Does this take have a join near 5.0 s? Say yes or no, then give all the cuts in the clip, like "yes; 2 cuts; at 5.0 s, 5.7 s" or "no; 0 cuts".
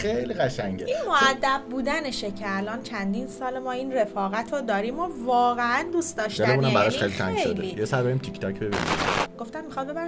no; 0 cuts